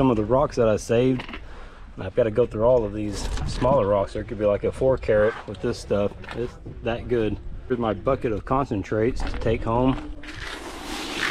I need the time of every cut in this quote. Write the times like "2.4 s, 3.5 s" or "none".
7.7 s